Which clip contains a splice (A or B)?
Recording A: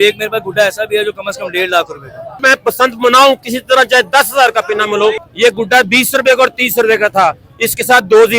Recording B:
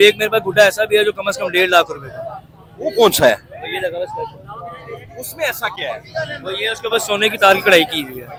A